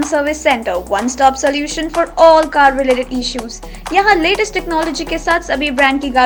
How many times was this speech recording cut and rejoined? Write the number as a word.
zero